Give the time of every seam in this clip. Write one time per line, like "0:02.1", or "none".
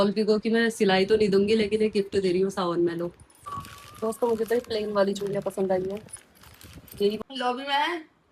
0:03.5
0:07.2